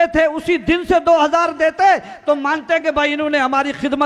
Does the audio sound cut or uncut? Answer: uncut